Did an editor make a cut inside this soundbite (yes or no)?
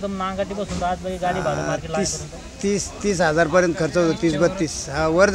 no